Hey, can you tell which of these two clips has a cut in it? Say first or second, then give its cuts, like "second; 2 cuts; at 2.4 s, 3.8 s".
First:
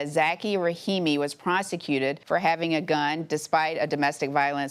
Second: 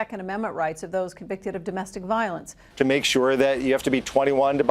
second; 1 cut; at 2.6 s